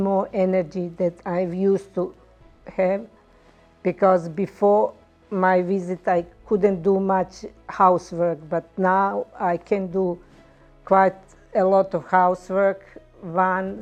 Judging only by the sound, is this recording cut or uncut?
uncut